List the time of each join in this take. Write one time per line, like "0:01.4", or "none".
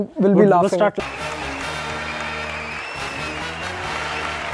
0:01.0